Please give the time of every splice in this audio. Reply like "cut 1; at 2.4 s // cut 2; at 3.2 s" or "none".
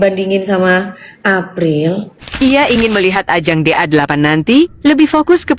cut 1; at 2.3 s